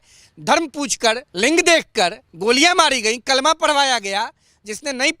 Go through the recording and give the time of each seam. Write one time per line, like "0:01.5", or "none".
0:01.3
0:02.3

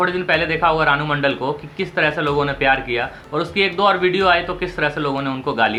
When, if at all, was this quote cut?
none

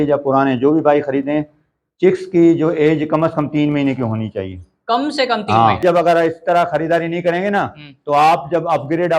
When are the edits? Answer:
0:05.8

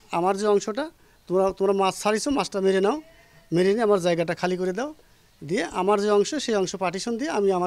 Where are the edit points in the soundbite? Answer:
none

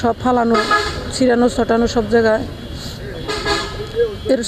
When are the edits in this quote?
none

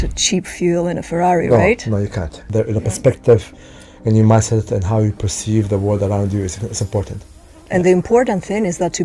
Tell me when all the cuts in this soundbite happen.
0:02.4
0:07.5

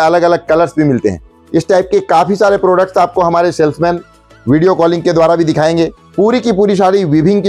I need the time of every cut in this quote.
0:01.3
0:06.0

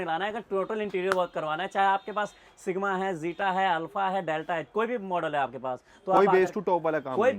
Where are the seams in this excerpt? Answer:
none

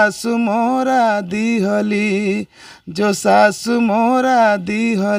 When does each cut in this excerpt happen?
none

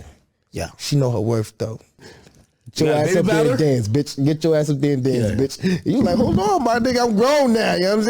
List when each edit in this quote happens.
0:02.1

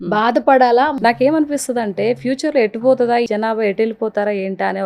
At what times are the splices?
0:00.9
0:03.3

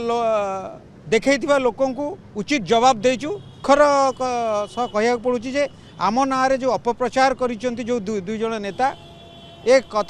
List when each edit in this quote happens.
0:03.5

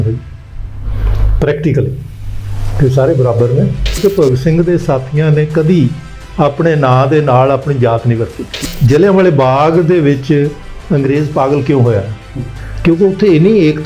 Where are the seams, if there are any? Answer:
0:04.0
0:08.6

